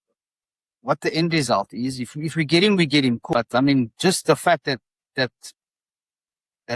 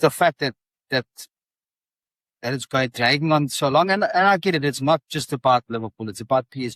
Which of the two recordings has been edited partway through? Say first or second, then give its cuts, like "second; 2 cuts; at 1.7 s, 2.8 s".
first; 1 cut; at 3.2 s